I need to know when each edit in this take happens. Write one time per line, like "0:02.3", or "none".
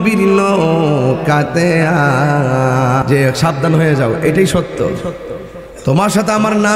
0:03.0

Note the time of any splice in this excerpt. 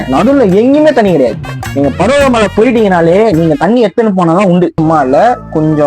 0:04.8

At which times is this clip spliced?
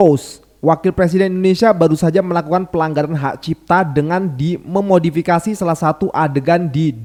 none

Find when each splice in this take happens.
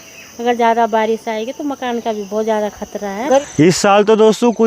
0:03.4

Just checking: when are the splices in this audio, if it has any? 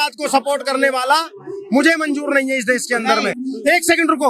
none

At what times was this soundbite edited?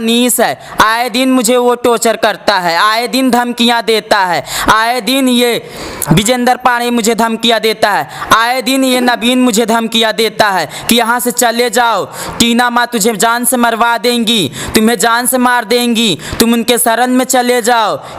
none

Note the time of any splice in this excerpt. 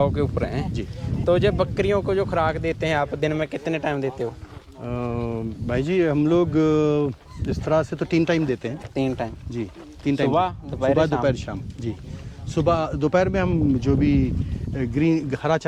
none

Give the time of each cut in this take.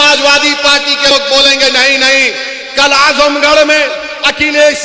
0:01.1

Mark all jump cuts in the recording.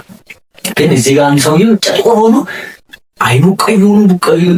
none

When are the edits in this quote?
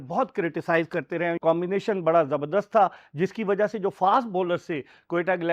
0:01.4

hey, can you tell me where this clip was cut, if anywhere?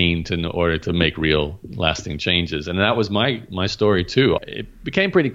0:04.4

